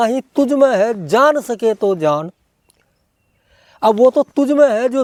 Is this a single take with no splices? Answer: yes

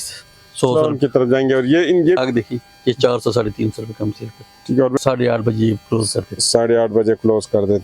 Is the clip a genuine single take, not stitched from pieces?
no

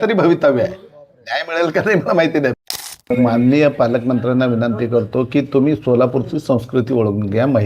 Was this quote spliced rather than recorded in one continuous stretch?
yes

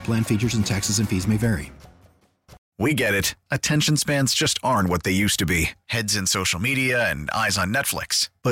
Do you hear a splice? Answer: yes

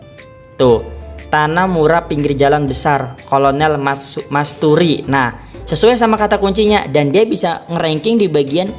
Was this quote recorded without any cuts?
yes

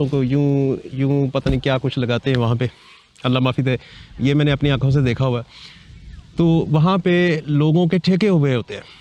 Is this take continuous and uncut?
yes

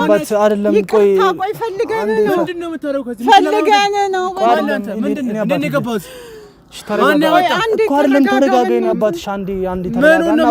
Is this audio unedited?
yes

